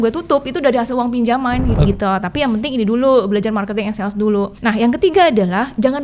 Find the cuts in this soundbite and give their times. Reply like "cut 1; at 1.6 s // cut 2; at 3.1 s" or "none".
cut 1; at 1.9 s // cut 2; at 4.5 s